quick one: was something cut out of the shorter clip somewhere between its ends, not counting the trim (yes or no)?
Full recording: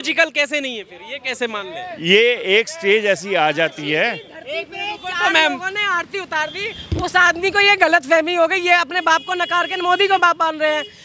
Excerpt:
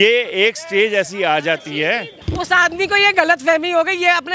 yes